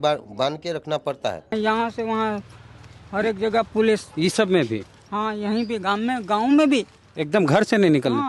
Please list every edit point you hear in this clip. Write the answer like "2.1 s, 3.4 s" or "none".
1.5 s